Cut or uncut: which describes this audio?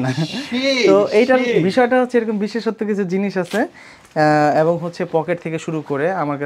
uncut